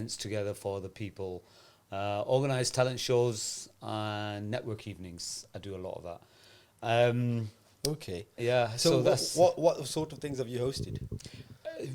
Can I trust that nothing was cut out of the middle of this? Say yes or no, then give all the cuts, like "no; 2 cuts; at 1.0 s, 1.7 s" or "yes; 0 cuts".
yes; 0 cuts